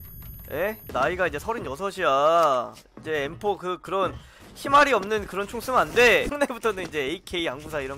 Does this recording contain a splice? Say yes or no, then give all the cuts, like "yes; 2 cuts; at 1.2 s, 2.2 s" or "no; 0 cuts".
yes; 2 cuts; at 0.8 s, 6.3 s